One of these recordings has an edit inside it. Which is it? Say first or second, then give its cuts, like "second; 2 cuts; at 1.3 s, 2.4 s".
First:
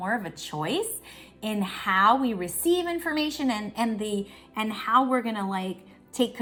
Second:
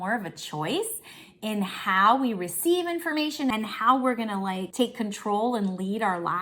second; 2 cuts; at 3.5 s, 4.7 s